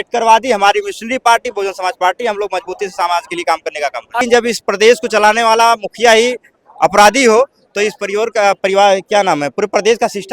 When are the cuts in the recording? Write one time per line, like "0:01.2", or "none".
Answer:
0:04.2